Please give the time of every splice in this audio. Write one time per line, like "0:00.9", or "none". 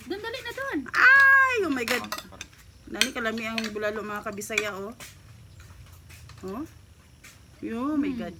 none